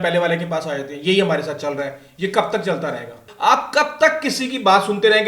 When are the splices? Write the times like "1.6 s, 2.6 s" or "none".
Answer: 3.3 s